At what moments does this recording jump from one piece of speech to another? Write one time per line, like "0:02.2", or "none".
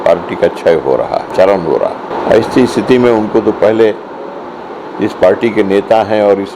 0:01.3
0:02.1